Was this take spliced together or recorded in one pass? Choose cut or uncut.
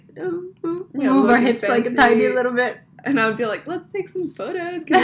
uncut